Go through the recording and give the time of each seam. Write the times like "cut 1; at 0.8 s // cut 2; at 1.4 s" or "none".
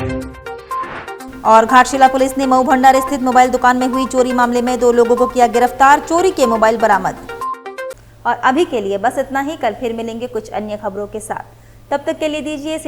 none